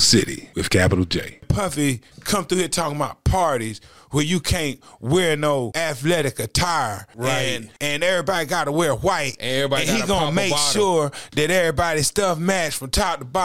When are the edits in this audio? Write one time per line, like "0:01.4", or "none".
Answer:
0:01.2
0:05.7
0:07.4

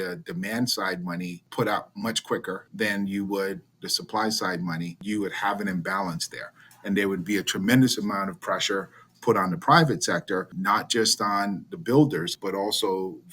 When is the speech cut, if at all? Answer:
0:01.4
0:02.7
0:05.0
0:10.6
0:12.3

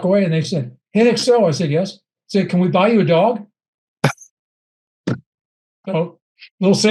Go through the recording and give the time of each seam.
none

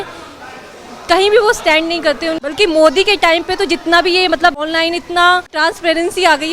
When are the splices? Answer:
0:02.4
0:04.6
0:05.5

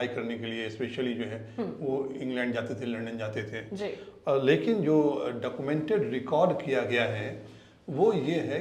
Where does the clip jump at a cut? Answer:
none

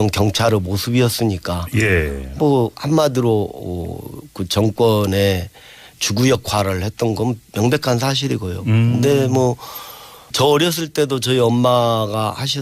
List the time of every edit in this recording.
0:06.7

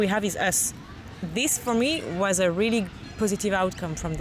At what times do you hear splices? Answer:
0:01.0

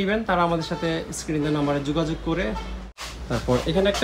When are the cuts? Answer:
0:03.1

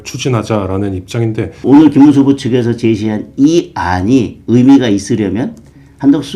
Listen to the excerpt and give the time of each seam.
0:01.6

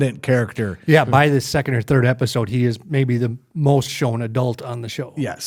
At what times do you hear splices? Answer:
none

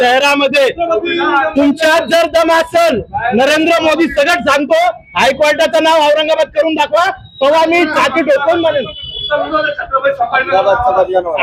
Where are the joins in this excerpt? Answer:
none

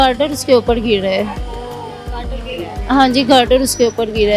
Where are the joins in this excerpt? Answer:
none

